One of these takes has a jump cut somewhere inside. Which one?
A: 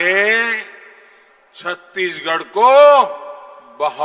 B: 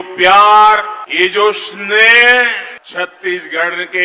B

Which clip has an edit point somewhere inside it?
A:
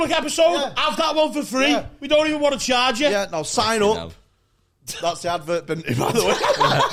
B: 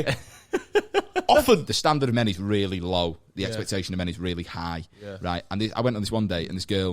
B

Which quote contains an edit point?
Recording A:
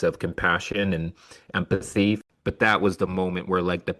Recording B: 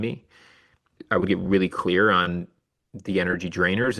A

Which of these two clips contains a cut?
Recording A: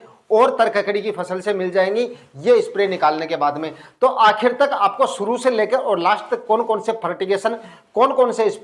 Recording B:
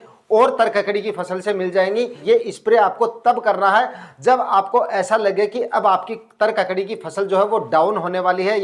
B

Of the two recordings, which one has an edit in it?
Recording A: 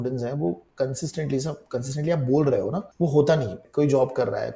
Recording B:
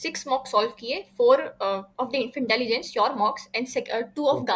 A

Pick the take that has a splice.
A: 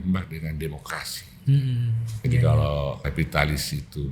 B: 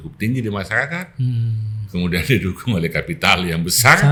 A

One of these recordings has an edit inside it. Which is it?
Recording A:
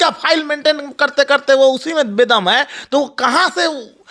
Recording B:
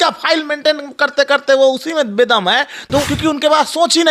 B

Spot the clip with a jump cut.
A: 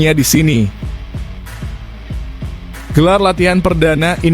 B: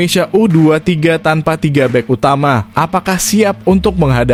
A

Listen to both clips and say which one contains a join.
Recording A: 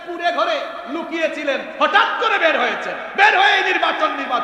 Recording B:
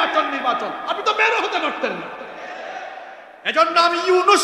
B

